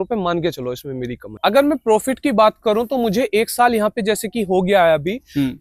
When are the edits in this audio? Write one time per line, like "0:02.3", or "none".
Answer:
none